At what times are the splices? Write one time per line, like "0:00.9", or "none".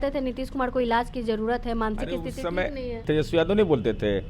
0:03.0